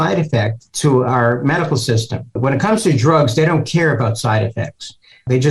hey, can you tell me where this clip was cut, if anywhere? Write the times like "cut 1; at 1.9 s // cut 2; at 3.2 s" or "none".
cut 1; at 2.4 s